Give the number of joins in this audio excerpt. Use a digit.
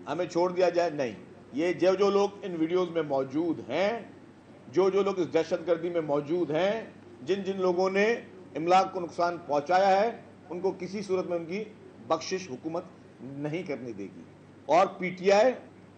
1